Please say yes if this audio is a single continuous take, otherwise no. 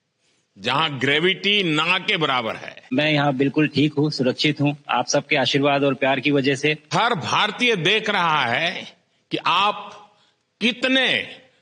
no